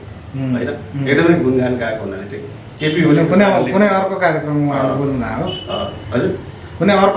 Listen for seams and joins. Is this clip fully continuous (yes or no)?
yes